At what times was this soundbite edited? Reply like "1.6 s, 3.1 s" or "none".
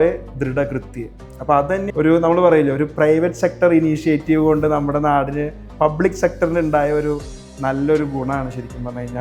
1.9 s